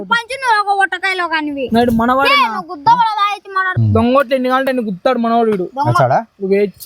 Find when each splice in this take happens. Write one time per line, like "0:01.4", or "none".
0:03.7